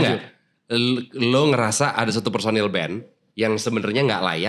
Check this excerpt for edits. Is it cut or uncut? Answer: uncut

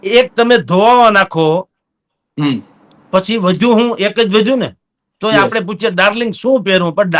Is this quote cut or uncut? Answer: uncut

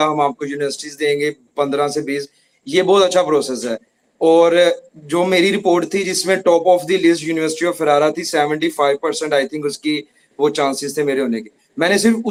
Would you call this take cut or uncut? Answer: uncut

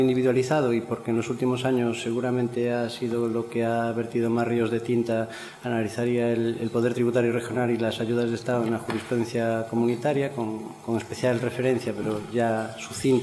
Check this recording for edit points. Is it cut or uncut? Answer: cut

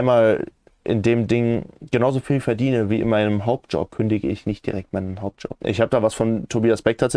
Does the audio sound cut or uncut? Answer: cut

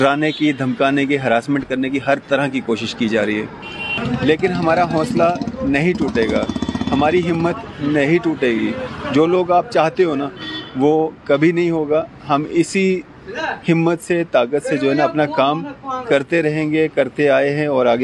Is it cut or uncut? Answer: cut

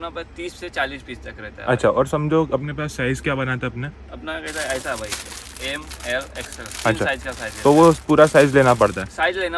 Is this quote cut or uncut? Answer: uncut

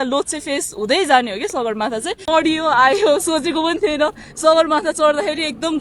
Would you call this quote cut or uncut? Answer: cut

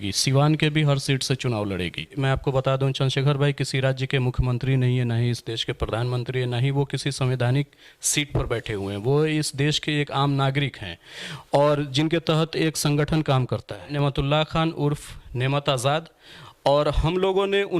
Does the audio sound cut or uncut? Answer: cut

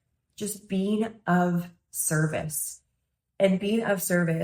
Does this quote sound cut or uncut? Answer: uncut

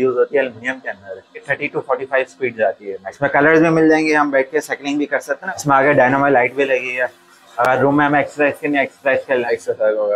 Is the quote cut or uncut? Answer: cut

